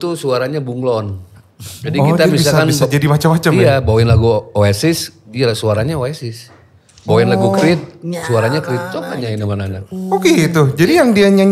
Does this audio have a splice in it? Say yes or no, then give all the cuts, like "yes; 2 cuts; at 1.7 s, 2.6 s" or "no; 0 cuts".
no; 0 cuts